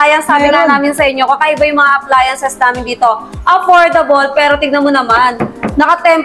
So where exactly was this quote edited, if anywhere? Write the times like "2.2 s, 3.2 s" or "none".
none